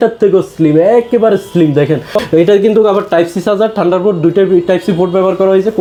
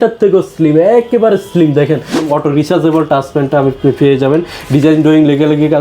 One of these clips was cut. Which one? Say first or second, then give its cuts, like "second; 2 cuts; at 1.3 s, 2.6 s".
second; 1 cut; at 2.1 s